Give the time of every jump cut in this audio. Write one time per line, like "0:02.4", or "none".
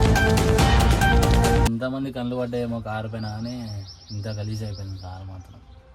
0:01.7